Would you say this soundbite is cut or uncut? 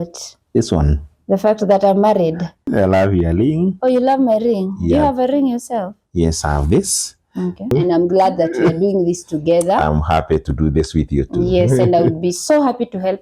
cut